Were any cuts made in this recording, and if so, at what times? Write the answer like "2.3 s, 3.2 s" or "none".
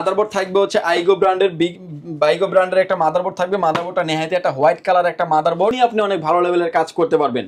5.8 s